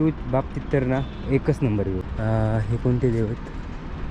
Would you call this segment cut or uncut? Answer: cut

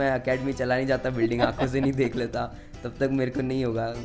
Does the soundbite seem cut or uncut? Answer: uncut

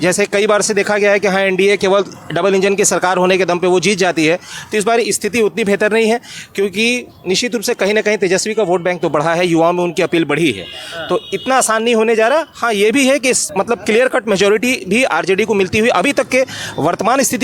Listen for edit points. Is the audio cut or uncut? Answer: uncut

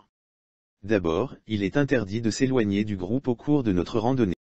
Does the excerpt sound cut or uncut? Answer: cut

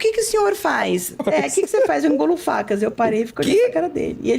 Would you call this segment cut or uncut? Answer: cut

